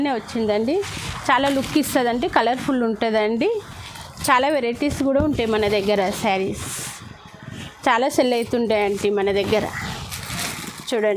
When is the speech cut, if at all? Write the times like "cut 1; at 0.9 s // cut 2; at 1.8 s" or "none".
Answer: none